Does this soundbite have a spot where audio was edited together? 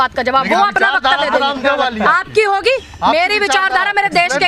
no; 0 cuts

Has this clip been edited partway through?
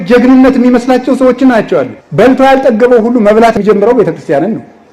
yes; 2 cuts; at 2.0 s, 3.5 s

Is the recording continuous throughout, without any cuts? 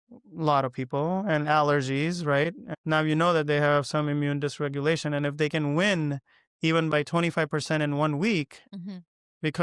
no; 1 cut; at 2.7 s

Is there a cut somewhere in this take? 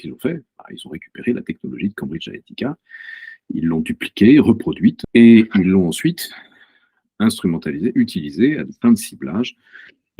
yes; 1 cut; at 5.0 s

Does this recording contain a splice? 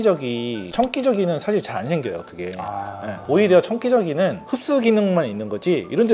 no; 0 cuts

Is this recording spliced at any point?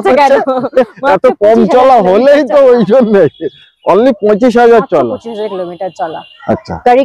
no; 0 cuts

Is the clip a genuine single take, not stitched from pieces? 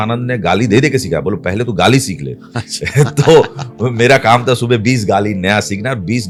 yes; 0 cuts

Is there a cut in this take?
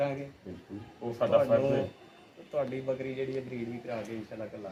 no; 0 cuts

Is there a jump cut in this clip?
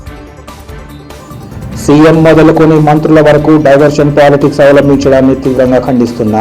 no; 0 cuts

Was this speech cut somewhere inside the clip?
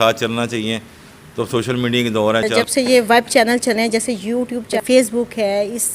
yes; 2 cuts; at 2.5 s, 4.8 s

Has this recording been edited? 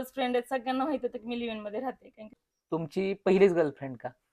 yes; 1 cut; at 2.3 s

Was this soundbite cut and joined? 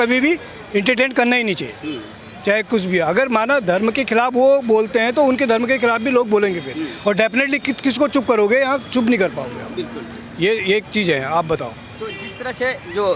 no; 0 cuts

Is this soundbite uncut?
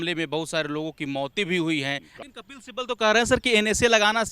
no; 1 cut; at 2.1 s

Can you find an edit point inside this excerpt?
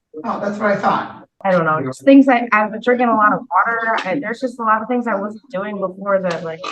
yes; 1 cut; at 1.3 s

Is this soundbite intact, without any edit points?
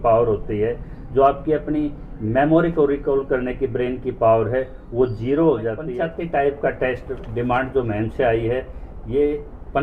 no; 1 cut; at 5.9 s

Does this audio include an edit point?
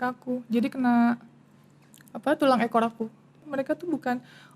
yes; 1 cut; at 3.5 s

